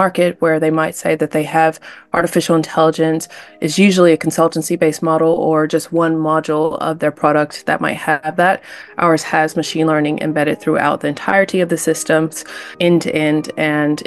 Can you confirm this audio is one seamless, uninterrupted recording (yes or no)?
yes